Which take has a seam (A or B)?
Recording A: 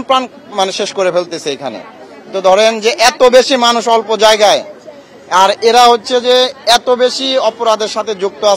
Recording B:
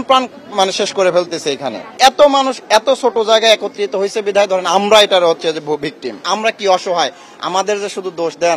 B